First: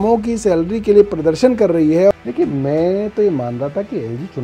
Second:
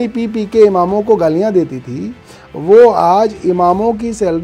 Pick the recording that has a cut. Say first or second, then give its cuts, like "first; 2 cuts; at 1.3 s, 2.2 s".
first; 1 cut; at 2.1 s